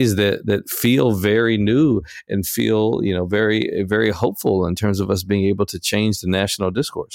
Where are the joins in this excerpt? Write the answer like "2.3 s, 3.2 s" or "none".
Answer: none